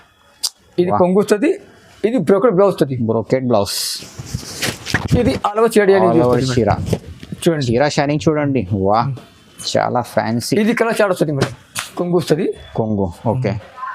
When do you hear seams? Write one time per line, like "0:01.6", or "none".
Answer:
0:11.9